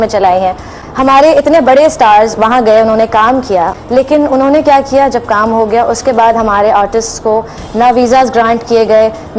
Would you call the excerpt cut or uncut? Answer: cut